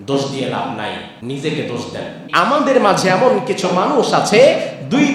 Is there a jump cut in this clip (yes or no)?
yes